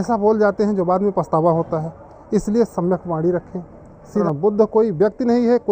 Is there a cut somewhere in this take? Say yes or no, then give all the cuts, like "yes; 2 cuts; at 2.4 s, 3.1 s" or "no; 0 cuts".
yes; 1 cut; at 4.2 s